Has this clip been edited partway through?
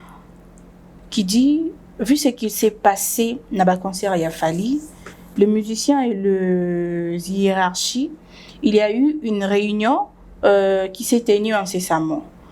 no; 0 cuts

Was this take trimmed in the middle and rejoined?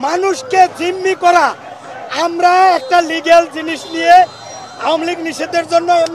no; 0 cuts

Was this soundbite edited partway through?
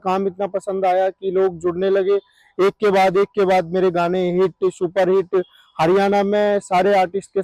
no; 0 cuts

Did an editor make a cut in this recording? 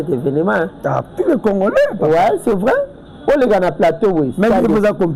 no; 0 cuts

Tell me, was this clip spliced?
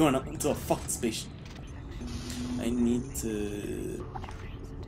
yes; 1 cut; at 1.7 s

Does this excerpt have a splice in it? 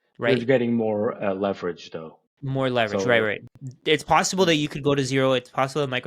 no; 0 cuts

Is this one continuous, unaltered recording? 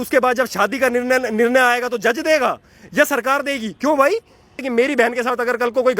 no; 1 cut; at 4.6 s

